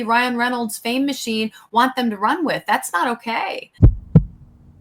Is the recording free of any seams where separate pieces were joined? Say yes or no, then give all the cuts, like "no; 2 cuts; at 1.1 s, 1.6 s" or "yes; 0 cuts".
no; 1 cut; at 3.6 s